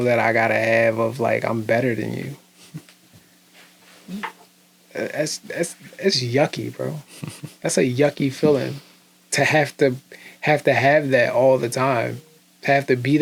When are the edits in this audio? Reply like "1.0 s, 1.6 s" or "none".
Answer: none